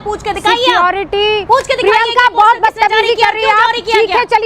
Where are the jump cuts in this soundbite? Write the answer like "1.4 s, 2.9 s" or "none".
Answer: none

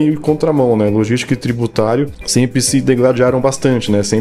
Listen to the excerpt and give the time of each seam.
2.2 s

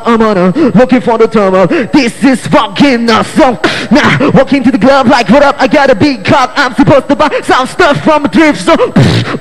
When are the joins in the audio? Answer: 3.0 s

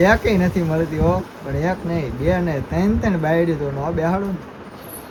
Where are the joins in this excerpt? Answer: none

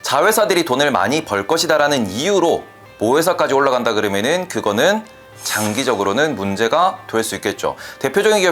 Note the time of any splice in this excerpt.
none

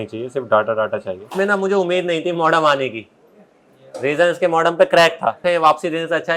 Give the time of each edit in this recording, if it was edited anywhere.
1.2 s, 5.5 s

